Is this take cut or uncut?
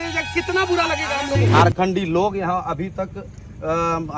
cut